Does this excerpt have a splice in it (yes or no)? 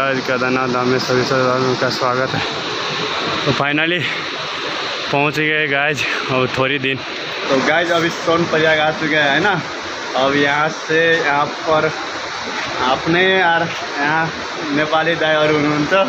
no